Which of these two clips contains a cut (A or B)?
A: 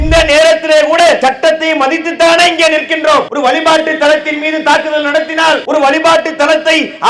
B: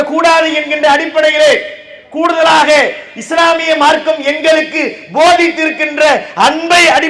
A